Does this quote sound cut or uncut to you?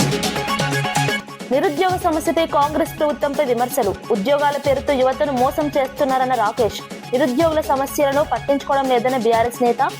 cut